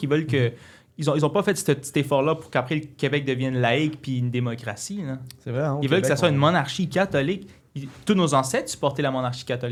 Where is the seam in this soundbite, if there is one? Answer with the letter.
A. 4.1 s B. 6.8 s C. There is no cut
C